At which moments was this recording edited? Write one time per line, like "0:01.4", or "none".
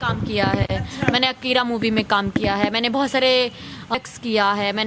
0:03.9